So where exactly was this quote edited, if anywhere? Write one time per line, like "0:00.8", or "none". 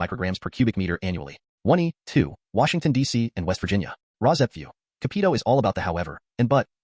0:01.4